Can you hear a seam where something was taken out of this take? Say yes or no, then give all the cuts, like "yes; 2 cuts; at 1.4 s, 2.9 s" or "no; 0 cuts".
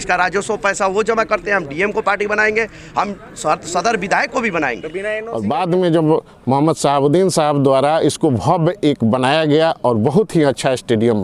yes; 1 cut; at 5.2 s